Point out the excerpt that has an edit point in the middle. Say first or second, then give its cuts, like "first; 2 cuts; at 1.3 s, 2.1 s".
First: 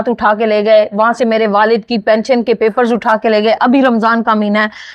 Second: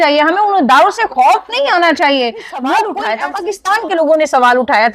second; 1 cut; at 3.0 s